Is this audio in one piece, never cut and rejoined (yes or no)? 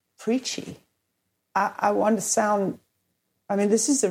yes